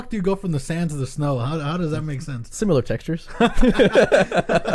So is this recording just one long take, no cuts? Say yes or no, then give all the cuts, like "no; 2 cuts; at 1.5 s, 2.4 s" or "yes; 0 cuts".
yes; 0 cuts